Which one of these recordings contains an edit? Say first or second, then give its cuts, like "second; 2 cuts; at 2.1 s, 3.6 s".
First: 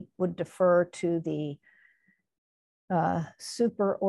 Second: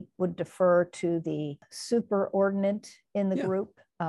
second; 1 cut; at 1.7 s